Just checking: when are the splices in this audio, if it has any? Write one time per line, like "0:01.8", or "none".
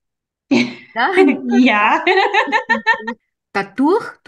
0:03.2